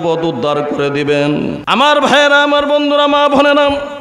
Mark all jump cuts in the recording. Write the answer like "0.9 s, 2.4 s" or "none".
1.6 s